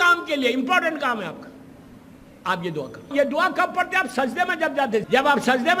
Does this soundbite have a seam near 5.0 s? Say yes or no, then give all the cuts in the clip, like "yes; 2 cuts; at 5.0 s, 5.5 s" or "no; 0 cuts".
yes; 2 cuts; at 3.1 s, 5.0 s